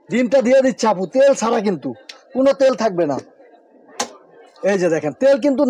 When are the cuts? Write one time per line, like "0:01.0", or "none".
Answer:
none